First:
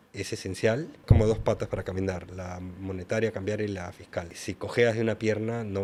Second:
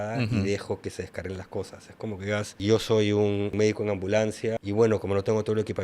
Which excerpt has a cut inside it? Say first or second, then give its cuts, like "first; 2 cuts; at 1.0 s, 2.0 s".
second; 3 cuts; at 2.5 s, 3.5 s, 4.6 s